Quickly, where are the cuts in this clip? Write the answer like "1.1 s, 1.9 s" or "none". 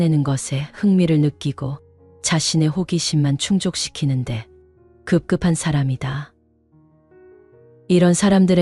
6.3 s, 7.8 s